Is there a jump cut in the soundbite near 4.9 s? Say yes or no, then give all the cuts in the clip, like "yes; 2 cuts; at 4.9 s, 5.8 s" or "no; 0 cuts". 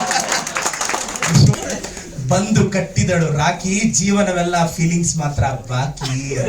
no; 1 cut; at 1.6 s